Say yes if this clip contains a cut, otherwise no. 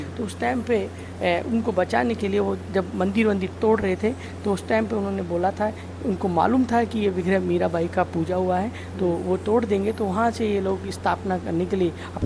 no